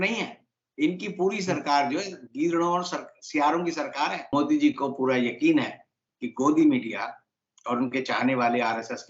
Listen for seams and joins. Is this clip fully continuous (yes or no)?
no